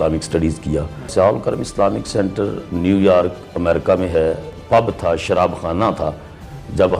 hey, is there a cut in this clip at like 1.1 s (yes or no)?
yes